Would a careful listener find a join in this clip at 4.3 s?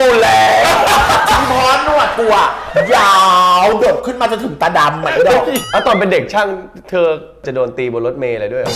no; 2 cuts; at 5.6 s, 7.5 s

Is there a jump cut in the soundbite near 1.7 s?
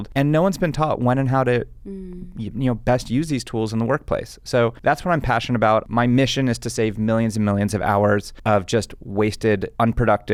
no; 0 cuts

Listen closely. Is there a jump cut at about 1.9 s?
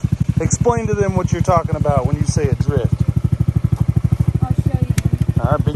no; 1 cut; at 4.2 s

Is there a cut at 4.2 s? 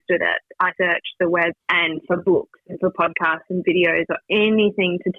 no; 0 cuts

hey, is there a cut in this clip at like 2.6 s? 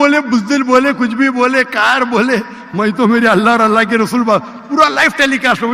no; 0 cuts

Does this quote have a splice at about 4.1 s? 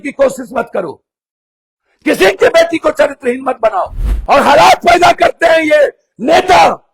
yes; 1 cut; at 4.1 s

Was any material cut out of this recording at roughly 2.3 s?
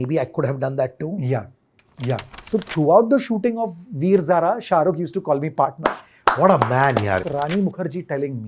yes; 2 cuts; at 2.3 s, 7.2 s

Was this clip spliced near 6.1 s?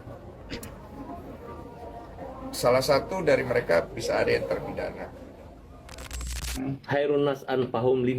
yes; 1 cut; at 6.1 s

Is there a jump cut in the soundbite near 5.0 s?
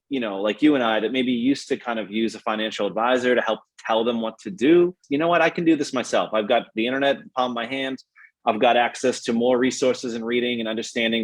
yes; 1 cut; at 5.0 s

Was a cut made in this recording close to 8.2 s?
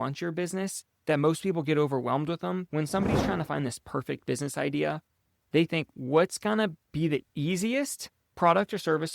no; 1 cut; at 2.6 s

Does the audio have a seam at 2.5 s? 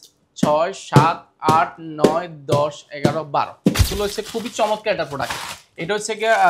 no; 1 cut; at 3.8 s

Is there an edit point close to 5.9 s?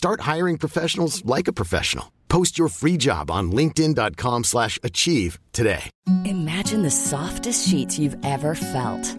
yes; 1 cut; at 5.9 s

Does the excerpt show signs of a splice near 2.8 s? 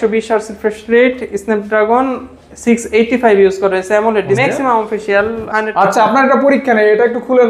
no; 2 cuts; at 4.4 s, 5.4 s

